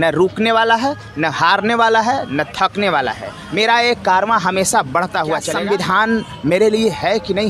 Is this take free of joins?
no; 1 cut; at 5.5 s

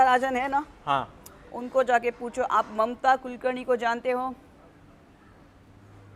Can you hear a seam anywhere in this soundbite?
no; 0 cuts

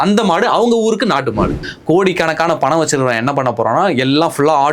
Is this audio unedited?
no; 1 cut; at 1.7 s

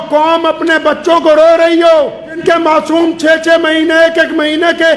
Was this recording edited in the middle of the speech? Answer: yes; 1 cut; at 2.5 s

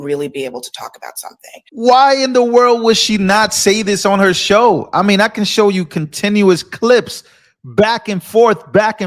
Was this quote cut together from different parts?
yes; 1 cut; at 1.9 s

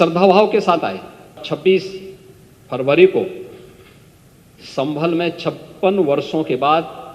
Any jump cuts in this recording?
yes; 1 cut; at 1.4 s

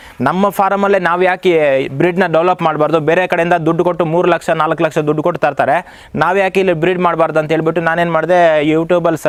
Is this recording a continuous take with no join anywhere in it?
yes; 0 cuts

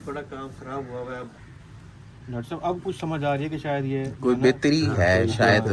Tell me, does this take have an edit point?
yes; 1 cut; at 1.3 s

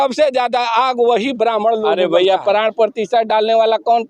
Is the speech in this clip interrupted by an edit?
yes; 1 cut; at 1.9 s

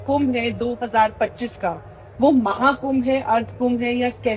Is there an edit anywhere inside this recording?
no; 0 cuts

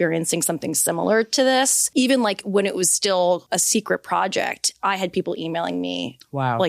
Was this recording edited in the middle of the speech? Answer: yes; 2 cuts; at 1.8 s, 3.4 s

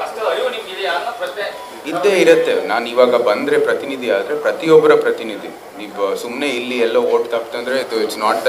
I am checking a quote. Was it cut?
no; 0 cuts

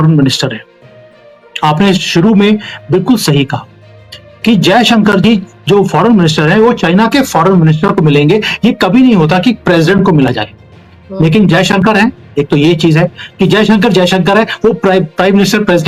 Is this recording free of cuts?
yes; 0 cuts

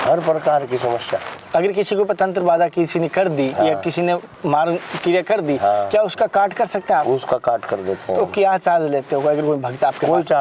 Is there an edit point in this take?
yes; 1 cut; at 1.4 s

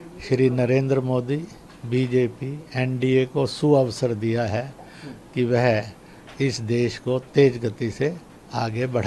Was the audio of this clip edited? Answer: no; 0 cuts

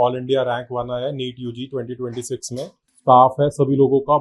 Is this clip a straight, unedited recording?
no; 1 cut; at 2.8 s

